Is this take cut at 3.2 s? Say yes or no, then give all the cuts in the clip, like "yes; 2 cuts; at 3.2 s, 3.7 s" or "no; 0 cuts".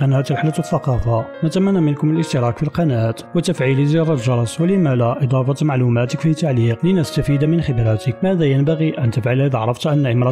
yes; 4 cuts; at 1.3 s, 3.2 s, 6.8 s, 8.1 s